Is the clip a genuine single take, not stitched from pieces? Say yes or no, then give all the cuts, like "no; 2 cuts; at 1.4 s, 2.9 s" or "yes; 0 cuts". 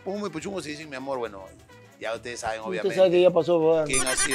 yes; 0 cuts